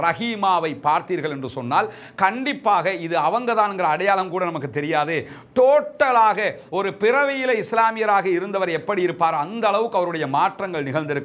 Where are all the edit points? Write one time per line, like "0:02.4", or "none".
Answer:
none